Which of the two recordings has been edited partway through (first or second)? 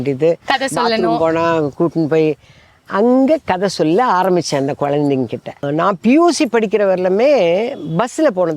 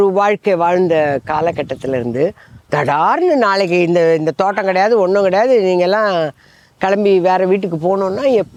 first